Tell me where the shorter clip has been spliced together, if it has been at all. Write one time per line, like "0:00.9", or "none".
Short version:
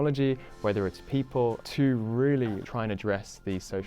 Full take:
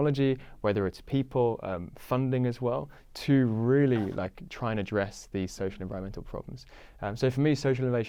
0:01.6
0:02.6